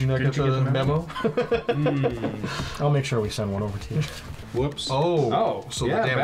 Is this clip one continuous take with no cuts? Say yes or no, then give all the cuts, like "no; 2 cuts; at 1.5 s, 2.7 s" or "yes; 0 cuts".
no; 1 cut; at 4.4 s